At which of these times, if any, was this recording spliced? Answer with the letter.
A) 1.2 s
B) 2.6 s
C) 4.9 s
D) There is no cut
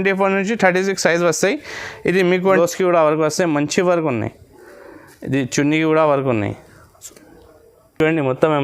B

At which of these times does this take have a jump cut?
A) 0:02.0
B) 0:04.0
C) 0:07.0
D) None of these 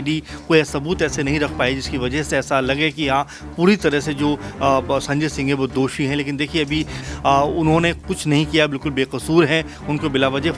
C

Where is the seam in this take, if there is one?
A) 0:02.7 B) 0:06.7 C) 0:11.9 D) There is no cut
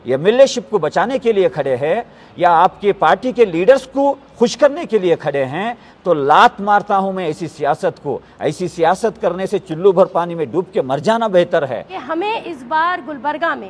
C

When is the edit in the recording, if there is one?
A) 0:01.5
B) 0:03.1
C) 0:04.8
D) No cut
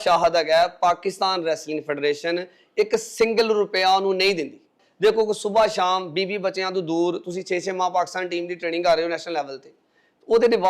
C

